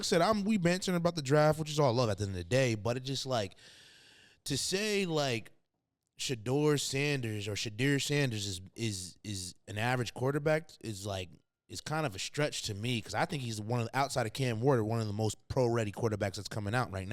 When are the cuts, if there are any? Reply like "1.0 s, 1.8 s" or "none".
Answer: none